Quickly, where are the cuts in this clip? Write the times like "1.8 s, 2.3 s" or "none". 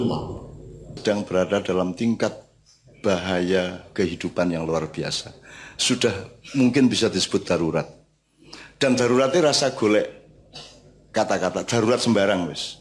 1.0 s